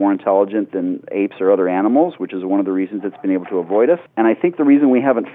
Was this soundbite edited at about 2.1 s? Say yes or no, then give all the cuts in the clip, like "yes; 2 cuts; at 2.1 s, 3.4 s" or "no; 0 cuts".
no; 1 cut; at 4.1 s